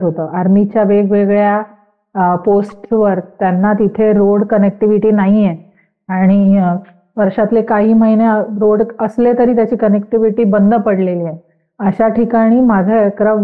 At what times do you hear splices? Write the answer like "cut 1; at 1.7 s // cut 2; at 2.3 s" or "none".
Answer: none